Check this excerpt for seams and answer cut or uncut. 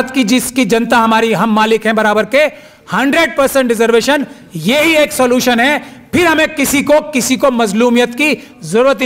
uncut